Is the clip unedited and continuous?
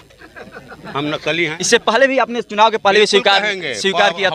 no; 1 cut; at 1.6 s

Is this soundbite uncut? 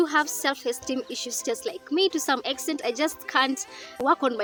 yes; 0 cuts

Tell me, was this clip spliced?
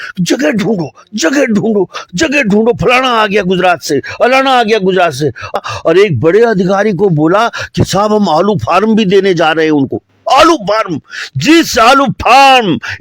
yes; 1 cut; at 5.5 s

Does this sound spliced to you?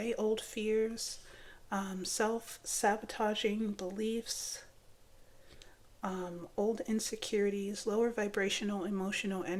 no; 0 cuts

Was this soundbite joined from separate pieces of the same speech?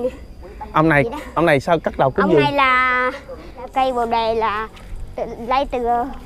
yes; 1 cut; at 3.7 s

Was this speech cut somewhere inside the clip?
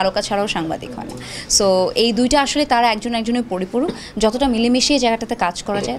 no; 0 cuts

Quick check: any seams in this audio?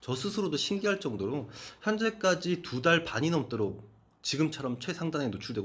no; 0 cuts

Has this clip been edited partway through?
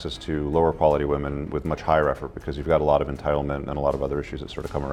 no; 0 cuts

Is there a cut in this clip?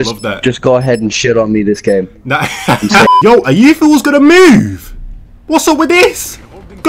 yes; 1 cut; at 3.2 s

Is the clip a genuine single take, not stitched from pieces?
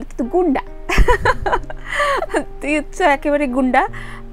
yes; 0 cuts

